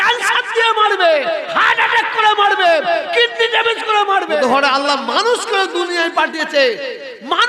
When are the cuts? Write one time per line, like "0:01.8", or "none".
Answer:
0:04.4